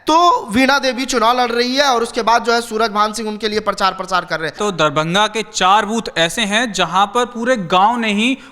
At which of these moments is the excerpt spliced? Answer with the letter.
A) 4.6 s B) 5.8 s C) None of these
A